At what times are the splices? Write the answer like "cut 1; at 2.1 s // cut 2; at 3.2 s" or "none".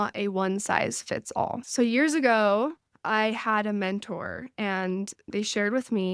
cut 1; at 1.6 s // cut 2; at 5.3 s